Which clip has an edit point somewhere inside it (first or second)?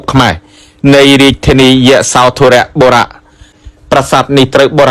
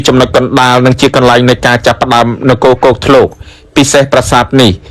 first